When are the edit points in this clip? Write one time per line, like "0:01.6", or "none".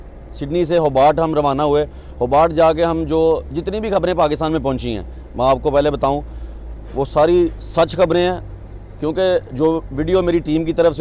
none